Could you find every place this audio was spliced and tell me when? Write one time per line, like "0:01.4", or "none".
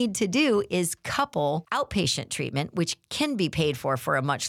0:01.7